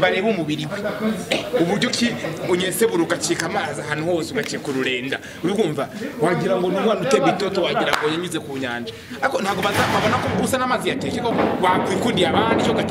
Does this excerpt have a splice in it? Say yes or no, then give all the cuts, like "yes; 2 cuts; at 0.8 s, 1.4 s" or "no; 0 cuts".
yes; 1 cut; at 11.3 s